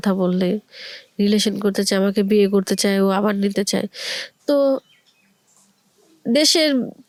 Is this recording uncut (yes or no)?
yes